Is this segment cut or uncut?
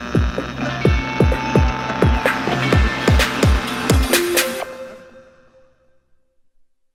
uncut